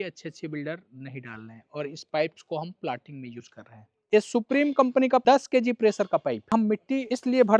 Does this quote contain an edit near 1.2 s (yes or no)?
no